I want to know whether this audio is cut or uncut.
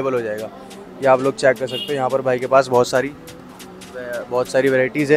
uncut